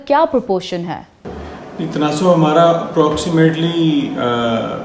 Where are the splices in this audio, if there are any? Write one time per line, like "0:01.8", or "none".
none